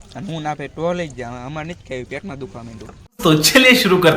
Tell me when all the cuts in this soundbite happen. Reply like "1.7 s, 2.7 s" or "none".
3.1 s